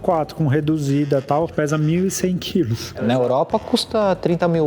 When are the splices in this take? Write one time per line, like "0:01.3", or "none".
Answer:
0:01.5
0:03.0